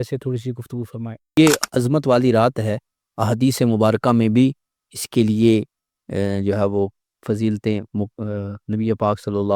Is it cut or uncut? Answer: cut